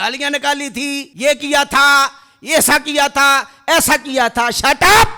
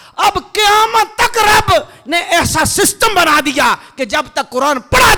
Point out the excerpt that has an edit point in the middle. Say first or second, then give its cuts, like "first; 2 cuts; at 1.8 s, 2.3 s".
first; 1 cut; at 1.1 s